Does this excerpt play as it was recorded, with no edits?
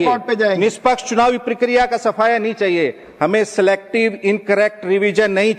yes; 0 cuts

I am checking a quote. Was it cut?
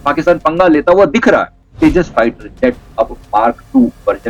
yes; 1 cut; at 1.6 s

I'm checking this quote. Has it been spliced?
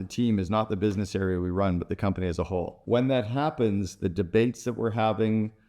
yes; 1 cut; at 2.8 s

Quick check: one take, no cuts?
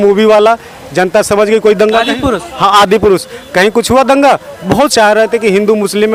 yes; 0 cuts

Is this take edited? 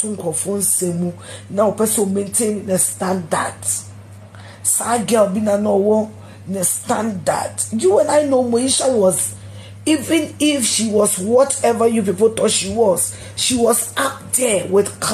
no; 0 cuts

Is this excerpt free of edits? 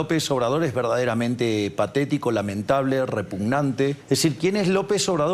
no; 1 cut; at 4.0 s

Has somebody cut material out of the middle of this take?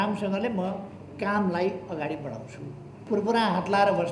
yes; 1 cut; at 3.0 s

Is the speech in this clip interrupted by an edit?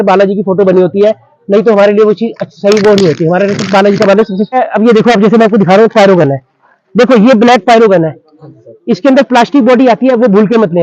yes; 1 cut; at 4.5 s

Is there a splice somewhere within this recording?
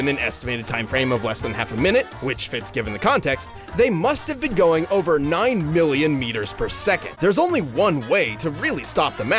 yes; 1 cut; at 7.1 s

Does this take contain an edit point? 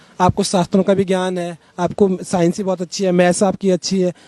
no; 0 cuts

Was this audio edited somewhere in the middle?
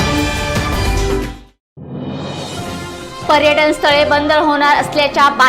yes; 1 cut; at 2.8 s

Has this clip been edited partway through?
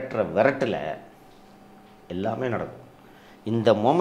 no; 0 cuts

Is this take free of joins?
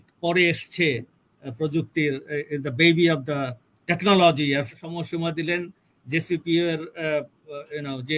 no; 1 cut; at 4.8 s

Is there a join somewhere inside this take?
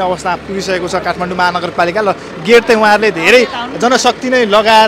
no; 0 cuts

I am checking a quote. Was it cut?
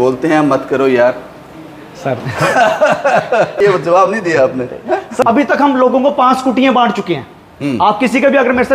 yes; 2 cuts; at 3.6 s, 5.2 s

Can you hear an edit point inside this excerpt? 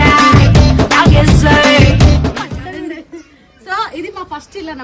no; 0 cuts

